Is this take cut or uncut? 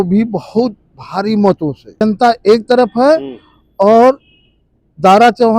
cut